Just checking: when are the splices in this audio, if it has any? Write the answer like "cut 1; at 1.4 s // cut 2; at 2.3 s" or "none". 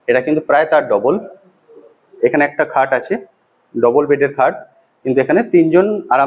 none